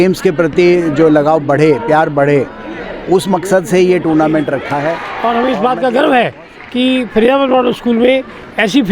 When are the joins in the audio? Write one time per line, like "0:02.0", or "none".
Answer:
0:05.1